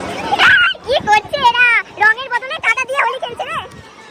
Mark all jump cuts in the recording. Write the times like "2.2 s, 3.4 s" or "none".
none